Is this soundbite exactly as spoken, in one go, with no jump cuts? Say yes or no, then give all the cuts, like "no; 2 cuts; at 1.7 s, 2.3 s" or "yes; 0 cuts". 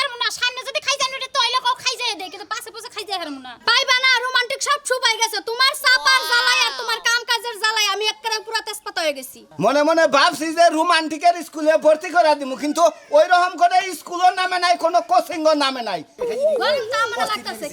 no; 2 cuts; at 3.5 s, 16.1 s